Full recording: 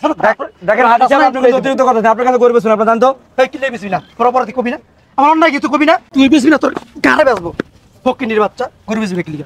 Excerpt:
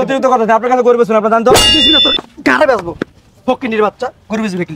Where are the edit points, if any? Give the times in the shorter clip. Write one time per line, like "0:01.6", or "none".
0:01.8